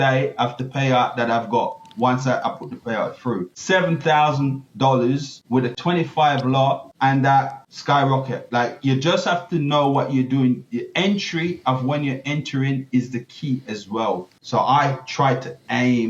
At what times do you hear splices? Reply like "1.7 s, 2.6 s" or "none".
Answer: 3.5 s, 5.8 s, 6.9 s, 7.7 s, 14.3 s